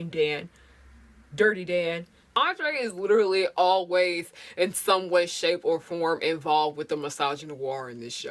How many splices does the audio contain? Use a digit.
1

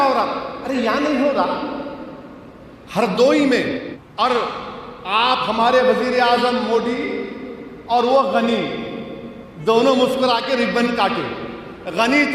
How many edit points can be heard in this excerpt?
1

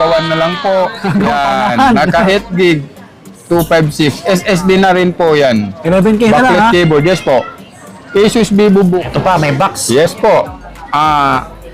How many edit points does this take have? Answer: 1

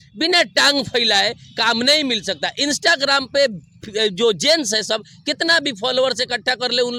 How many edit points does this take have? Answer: 0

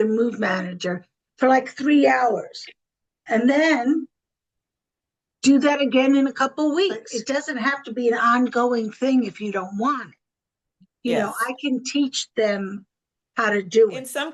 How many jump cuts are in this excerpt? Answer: 0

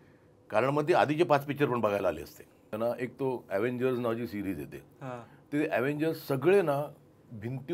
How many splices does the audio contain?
1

